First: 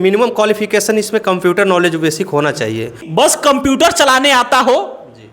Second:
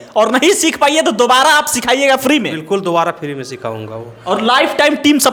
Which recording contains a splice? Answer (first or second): first